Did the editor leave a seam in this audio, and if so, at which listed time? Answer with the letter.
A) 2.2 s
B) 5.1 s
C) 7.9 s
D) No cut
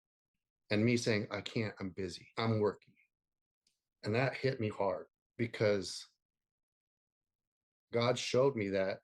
A